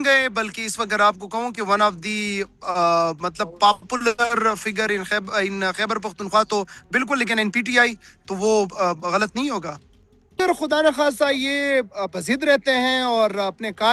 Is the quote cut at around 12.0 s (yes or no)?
no